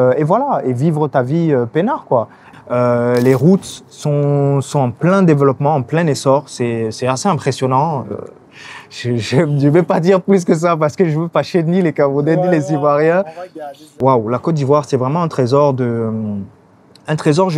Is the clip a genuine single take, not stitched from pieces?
no; 2 cuts; at 2.4 s, 13.8 s

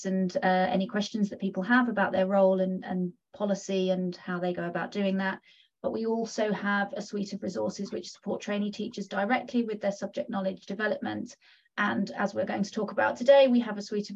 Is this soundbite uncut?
yes; 0 cuts

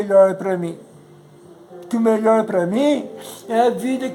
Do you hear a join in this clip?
no; 0 cuts

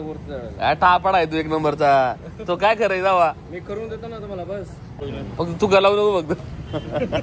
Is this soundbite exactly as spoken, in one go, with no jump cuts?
no; 1 cut; at 5.0 s

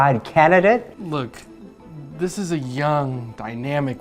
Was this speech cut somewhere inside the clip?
yes; 1 cut; at 0.9 s

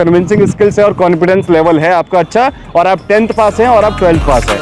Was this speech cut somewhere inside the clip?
no; 0 cuts

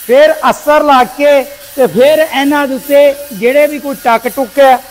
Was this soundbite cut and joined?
no; 0 cuts

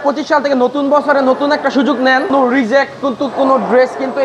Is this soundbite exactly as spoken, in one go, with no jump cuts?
no; 1 cut; at 2.3 s

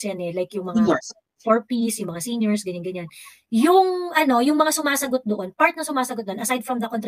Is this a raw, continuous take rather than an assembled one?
yes; 0 cuts

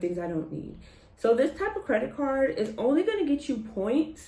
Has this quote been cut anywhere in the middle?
no; 0 cuts

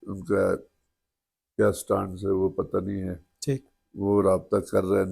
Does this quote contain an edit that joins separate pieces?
no; 0 cuts

